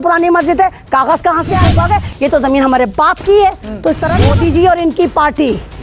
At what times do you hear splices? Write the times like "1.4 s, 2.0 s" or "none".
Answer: 1.6 s, 4.1 s